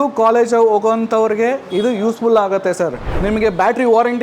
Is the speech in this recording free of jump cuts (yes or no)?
no